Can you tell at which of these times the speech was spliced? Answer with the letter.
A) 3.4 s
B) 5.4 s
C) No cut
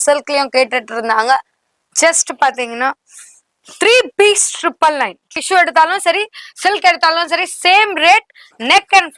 B